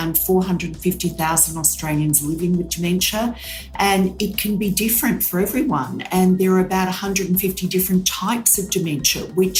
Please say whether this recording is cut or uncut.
uncut